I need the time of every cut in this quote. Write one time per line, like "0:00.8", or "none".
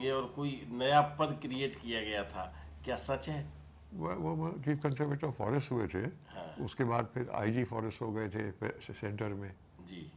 none